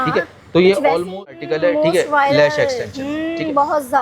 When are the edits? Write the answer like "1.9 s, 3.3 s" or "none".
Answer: 1.4 s